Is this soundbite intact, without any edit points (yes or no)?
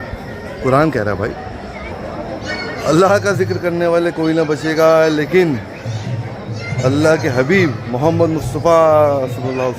no